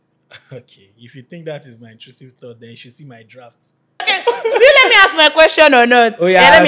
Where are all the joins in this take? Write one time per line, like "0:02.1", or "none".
0:04.1

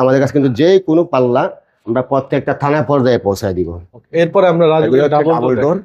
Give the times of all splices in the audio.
none

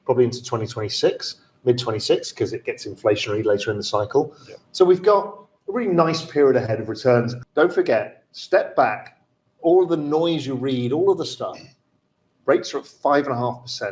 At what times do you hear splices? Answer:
0:07.4

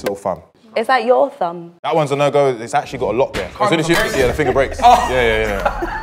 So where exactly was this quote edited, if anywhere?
0:01.9
0:03.5

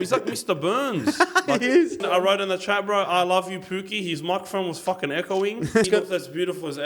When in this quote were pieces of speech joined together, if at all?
0:02.0
0:05.9

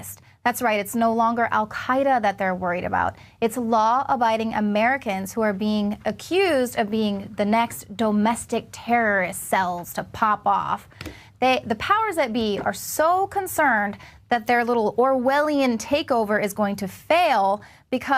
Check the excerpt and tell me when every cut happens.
none

